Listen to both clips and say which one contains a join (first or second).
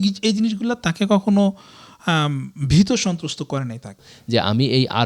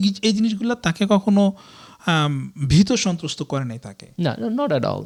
first